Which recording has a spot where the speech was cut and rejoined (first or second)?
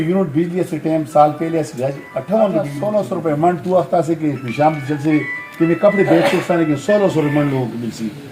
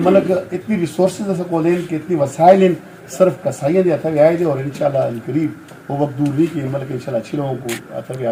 first